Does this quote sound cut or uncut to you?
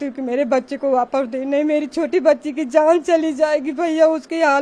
uncut